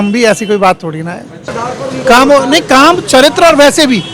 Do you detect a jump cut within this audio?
yes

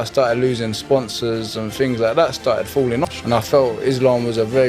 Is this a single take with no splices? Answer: no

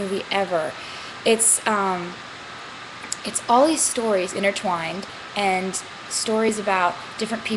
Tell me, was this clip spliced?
no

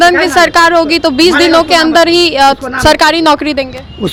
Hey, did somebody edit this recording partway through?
no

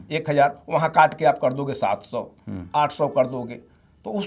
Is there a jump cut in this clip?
no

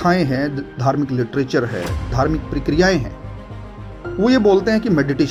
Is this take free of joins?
yes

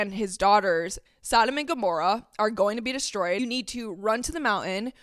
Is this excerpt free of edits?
no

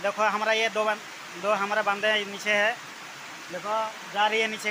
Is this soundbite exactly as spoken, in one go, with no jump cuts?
yes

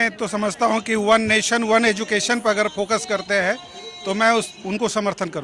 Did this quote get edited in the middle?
no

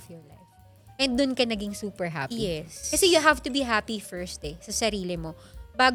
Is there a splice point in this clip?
no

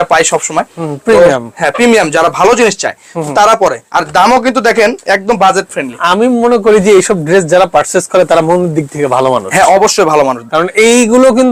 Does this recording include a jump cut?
no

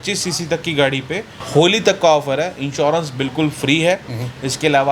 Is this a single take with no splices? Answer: no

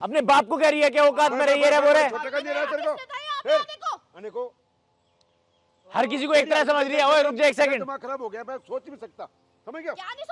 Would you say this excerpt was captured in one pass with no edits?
yes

